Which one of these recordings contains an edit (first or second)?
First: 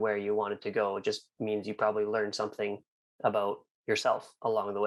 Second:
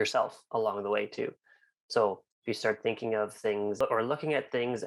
second